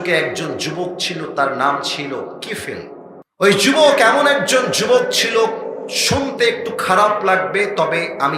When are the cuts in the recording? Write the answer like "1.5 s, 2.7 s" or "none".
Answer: 3.2 s

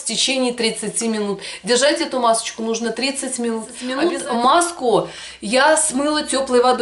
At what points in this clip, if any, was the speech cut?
3.8 s

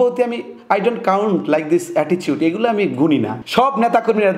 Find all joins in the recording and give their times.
3.4 s

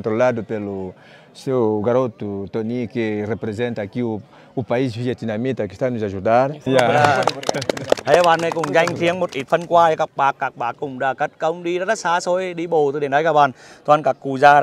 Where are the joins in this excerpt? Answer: 6.6 s

